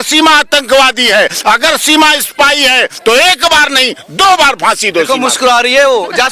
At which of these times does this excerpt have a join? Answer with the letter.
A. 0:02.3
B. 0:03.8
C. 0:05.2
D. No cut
D